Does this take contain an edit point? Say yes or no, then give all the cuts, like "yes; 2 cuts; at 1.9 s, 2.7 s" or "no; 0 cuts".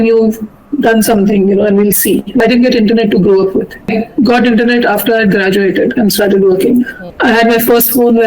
yes; 3 cuts; at 2.4 s, 3.9 s, 7.0 s